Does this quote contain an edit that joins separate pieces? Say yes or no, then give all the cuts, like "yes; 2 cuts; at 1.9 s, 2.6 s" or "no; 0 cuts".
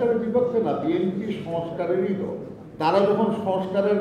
no; 0 cuts